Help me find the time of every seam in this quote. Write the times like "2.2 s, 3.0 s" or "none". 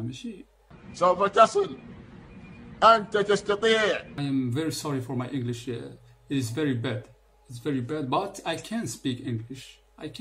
4.1 s